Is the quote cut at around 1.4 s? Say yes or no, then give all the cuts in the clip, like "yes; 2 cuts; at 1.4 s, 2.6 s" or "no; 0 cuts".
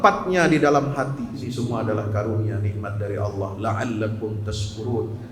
yes; 1 cut; at 1.4 s